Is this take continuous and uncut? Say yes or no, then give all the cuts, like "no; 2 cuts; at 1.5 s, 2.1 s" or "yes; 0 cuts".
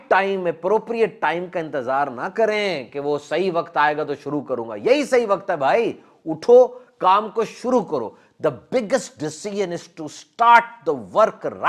yes; 0 cuts